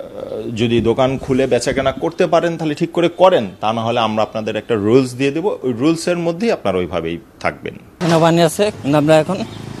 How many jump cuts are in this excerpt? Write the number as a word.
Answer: one